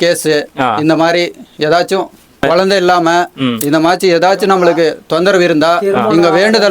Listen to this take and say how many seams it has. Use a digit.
1